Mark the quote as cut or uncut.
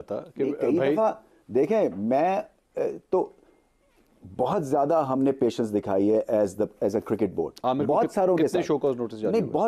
uncut